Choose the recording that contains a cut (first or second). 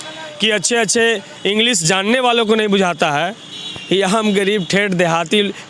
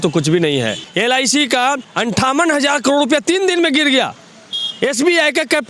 second